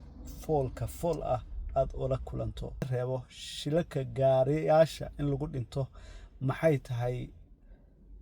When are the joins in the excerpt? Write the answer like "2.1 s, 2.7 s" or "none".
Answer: 2.8 s

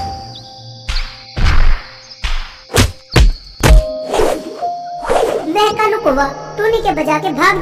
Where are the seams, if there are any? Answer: none

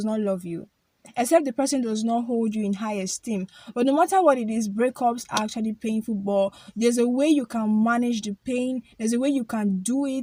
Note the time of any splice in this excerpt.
none

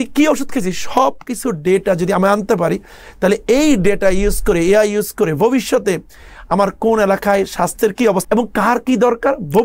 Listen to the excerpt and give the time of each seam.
8.2 s

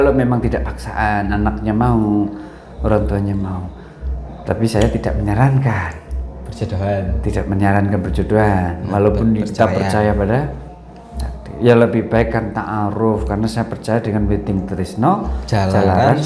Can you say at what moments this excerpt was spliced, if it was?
none

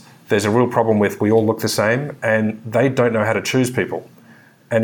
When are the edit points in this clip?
none

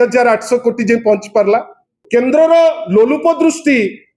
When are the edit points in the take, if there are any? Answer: 2.0 s

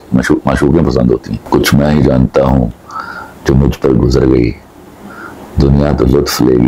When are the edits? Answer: 1.3 s

